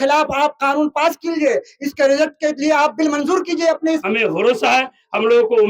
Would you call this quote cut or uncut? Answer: cut